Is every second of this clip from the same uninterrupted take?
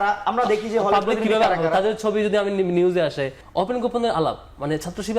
no; 1 cut; at 3.4 s

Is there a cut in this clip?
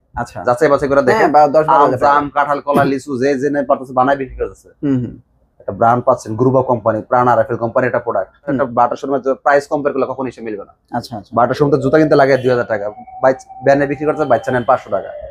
yes; 1 cut; at 8.6 s

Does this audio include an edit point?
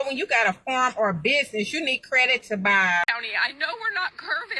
yes; 1 cut; at 3.1 s

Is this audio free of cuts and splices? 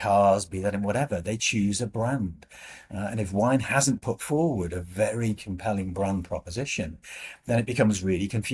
yes; 0 cuts

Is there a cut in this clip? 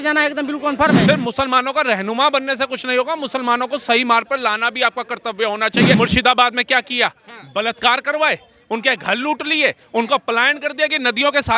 yes; 2 cuts; at 1.0 s, 5.9 s

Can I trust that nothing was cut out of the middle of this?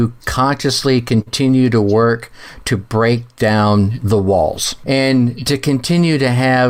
no; 1 cut; at 4.8 s

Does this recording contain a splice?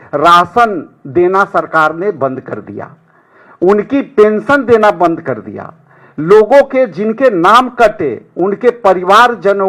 no; 0 cuts

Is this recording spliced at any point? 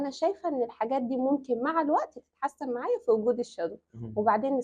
no; 0 cuts

